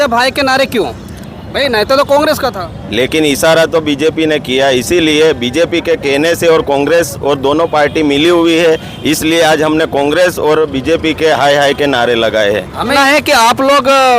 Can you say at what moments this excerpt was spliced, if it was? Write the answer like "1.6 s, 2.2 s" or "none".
13.0 s